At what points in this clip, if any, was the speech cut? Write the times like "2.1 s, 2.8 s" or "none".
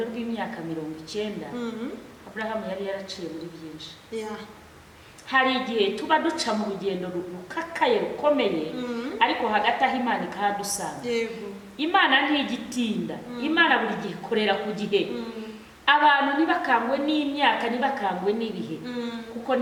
none